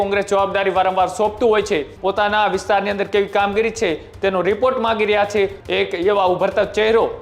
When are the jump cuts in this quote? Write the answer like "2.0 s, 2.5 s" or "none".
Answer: 1.9 s, 5.6 s